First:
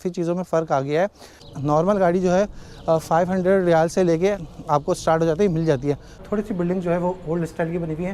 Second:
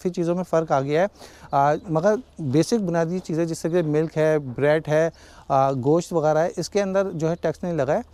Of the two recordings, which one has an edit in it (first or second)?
first